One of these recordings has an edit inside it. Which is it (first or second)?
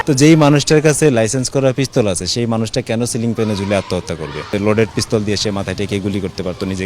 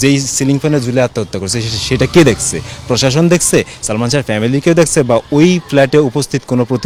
first